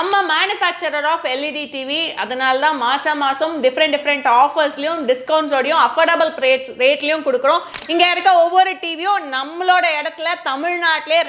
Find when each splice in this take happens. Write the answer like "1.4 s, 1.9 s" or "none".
none